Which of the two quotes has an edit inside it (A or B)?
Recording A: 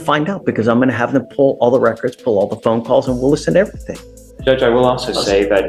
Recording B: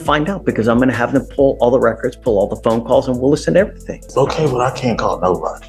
B